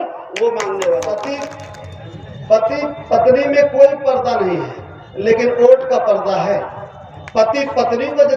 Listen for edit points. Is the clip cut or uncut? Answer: cut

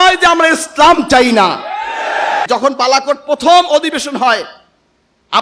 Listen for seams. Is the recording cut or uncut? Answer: cut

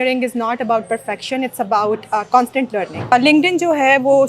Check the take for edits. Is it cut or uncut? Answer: cut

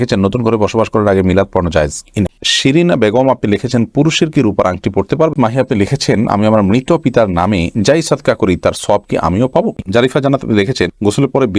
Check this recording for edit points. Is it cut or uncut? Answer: cut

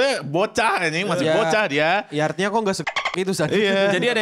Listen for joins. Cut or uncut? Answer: uncut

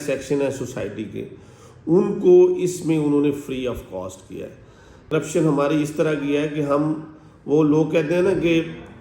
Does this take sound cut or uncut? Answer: cut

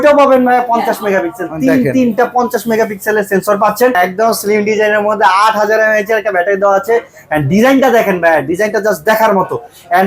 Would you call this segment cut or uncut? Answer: cut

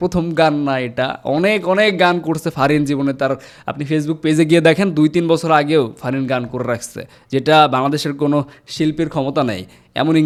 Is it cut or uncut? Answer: uncut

